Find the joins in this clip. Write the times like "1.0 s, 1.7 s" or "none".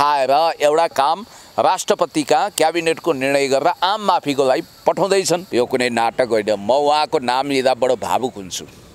5.5 s